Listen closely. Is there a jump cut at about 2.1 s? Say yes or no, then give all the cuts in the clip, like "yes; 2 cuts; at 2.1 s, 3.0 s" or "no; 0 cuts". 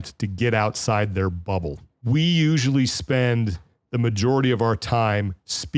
yes; 1 cut; at 2.1 s